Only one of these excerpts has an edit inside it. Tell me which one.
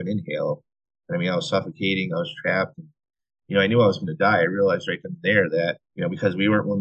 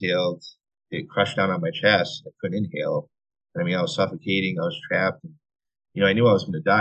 first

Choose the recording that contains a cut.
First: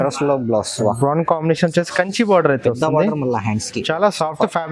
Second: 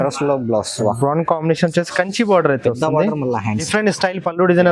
second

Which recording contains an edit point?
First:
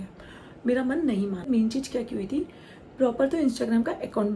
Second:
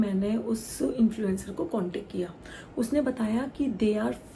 first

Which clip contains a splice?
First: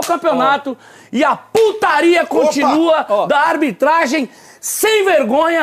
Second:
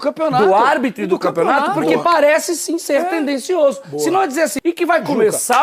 second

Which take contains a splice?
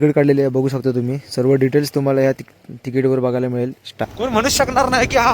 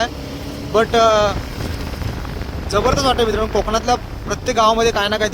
first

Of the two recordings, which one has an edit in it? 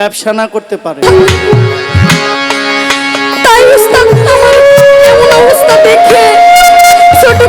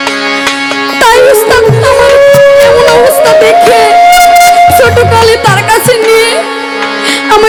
first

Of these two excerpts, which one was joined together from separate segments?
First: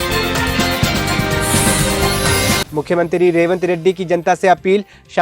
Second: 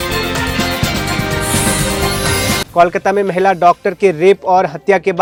first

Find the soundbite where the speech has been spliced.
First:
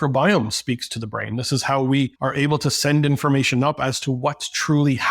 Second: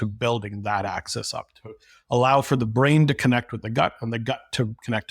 first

